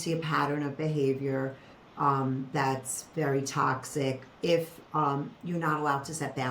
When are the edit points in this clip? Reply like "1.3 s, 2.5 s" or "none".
none